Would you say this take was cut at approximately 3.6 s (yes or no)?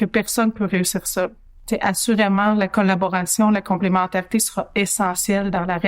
no